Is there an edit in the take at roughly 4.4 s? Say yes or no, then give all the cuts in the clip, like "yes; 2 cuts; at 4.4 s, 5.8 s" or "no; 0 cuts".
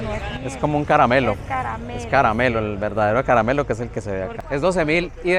yes; 1 cut; at 4.4 s